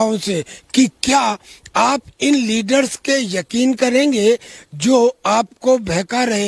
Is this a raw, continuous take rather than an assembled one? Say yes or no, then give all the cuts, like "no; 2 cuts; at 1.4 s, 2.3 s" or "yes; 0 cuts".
yes; 0 cuts